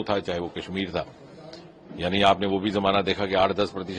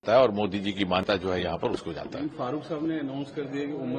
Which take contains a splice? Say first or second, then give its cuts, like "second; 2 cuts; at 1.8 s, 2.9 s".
second; 1 cut; at 1.0 s